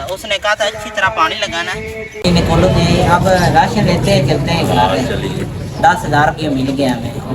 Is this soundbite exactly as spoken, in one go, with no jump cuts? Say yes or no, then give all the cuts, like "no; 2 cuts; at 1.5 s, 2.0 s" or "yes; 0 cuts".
no; 1 cut; at 2.2 s